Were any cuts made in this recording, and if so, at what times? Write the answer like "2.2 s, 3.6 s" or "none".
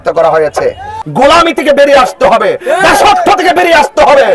1.0 s